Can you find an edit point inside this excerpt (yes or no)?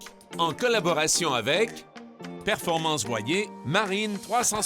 yes